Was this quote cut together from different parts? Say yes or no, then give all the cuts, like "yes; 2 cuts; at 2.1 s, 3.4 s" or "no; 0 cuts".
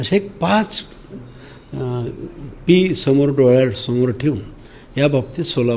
no; 0 cuts